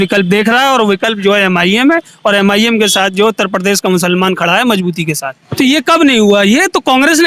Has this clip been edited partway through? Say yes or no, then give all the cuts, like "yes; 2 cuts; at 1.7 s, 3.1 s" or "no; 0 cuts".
yes; 1 cut; at 5.4 s